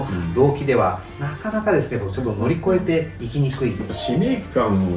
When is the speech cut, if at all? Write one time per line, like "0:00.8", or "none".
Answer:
0:03.8